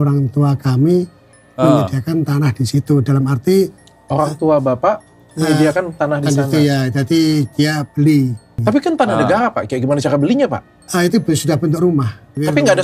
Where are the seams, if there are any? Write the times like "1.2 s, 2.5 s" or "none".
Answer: none